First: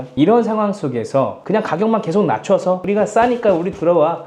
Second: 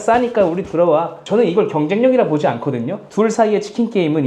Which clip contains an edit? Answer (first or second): first